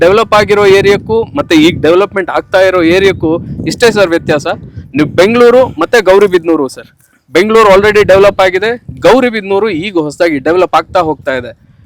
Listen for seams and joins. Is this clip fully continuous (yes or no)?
yes